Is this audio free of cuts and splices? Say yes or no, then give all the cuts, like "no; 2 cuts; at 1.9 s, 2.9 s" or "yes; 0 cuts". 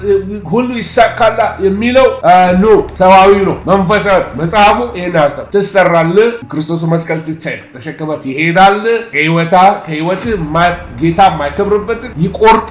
no; 1 cut; at 2.9 s